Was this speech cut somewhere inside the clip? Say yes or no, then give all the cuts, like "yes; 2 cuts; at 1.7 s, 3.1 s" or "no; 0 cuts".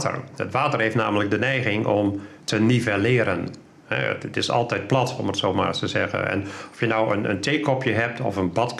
no; 0 cuts